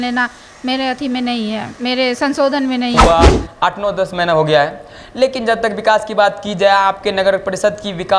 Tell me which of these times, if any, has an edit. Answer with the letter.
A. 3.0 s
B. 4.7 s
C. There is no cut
A